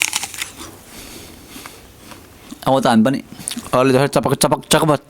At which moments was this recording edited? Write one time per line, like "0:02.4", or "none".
0:02.5